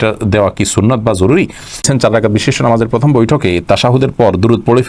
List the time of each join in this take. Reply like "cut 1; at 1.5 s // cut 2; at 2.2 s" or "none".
cut 1; at 1.9 s